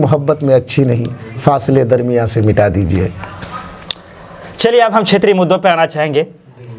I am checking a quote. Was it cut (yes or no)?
no